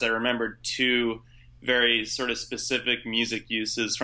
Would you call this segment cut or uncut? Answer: uncut